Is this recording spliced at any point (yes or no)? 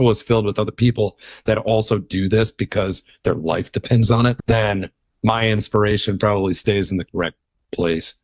yes